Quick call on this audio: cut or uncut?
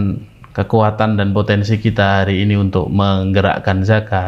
uncut